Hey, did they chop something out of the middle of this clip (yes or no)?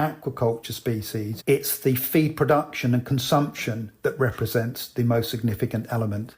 yes